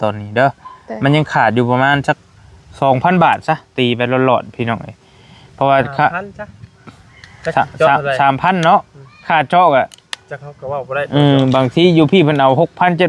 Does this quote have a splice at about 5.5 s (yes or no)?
no